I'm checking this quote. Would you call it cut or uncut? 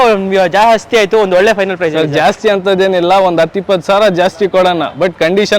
uncut